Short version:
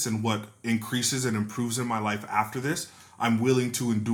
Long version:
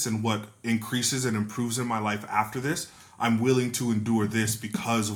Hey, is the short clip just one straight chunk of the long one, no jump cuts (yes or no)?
yes